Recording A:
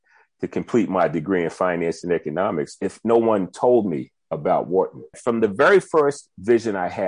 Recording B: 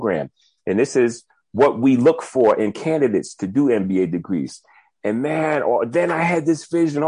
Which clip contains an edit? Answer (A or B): A